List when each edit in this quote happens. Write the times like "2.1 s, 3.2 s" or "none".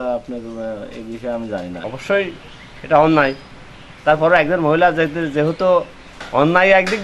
1.8 s